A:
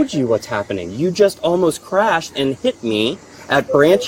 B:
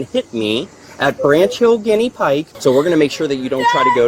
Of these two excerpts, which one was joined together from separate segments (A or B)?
B